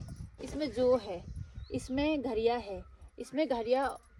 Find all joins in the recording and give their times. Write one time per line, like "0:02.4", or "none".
none